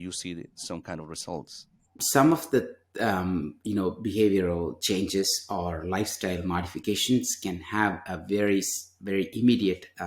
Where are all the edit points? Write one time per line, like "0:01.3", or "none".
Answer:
0:01.9